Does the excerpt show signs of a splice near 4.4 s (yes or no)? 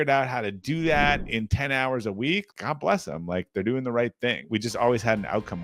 yes